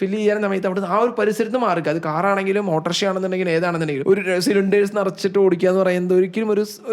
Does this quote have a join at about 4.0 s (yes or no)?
yes